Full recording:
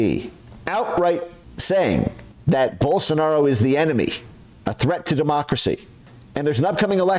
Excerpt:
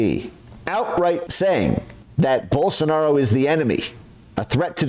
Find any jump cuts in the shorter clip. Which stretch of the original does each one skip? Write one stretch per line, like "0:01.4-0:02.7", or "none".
0:01.3-0:01.6